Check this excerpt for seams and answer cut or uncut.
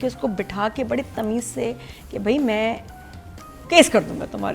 uncut